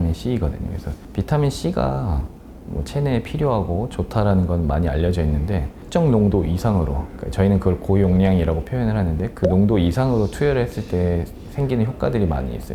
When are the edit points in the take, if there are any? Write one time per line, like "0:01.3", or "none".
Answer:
none